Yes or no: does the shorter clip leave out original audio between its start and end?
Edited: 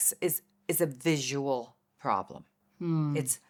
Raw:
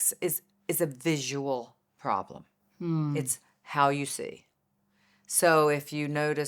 no